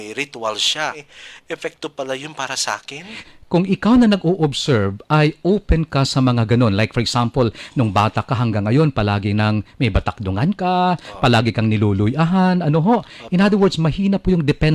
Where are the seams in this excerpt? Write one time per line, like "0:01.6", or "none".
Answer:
0:01.1
0:03.2